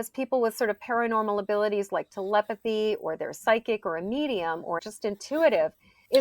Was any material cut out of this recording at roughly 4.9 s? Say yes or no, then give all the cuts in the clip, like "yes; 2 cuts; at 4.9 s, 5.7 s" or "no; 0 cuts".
yes; 1 cut; at 4.9 s